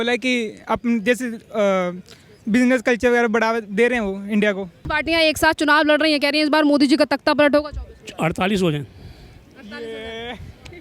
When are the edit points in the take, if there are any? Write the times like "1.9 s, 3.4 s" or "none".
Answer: 4.7 s